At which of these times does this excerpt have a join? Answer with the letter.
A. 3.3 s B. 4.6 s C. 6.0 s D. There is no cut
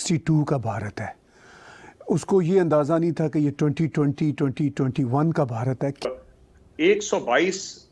C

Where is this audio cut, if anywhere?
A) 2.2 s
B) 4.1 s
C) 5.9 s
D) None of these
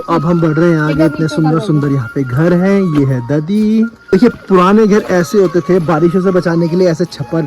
B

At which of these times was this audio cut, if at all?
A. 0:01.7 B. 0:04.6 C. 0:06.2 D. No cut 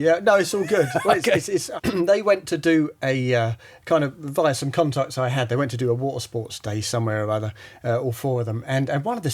A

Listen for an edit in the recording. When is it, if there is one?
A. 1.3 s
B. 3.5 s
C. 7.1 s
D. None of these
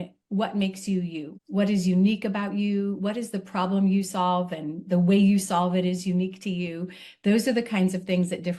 A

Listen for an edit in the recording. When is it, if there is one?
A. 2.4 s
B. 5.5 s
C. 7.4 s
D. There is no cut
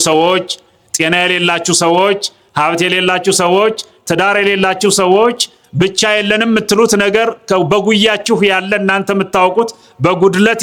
D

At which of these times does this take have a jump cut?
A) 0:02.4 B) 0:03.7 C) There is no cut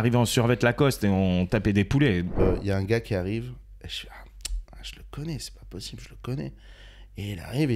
A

